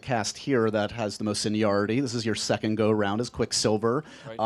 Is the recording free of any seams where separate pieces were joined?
yes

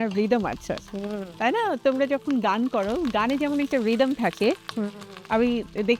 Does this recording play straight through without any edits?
yes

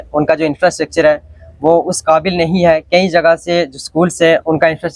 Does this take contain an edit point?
no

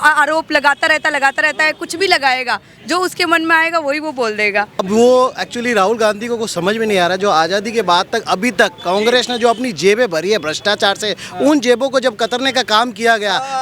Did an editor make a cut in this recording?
yes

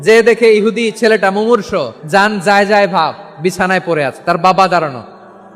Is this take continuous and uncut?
no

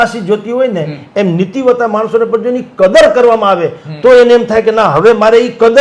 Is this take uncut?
yes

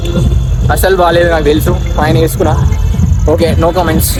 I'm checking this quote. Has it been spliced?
no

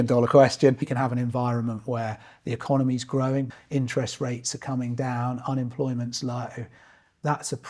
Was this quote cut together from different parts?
yes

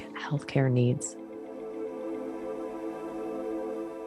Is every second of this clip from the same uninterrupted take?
no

